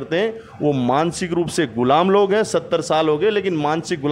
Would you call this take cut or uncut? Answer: uncut